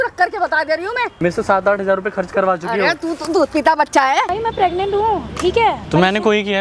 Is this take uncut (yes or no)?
no